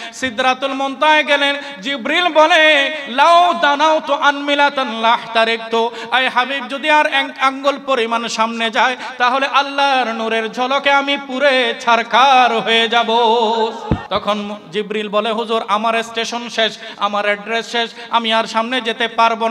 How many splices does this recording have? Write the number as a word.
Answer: one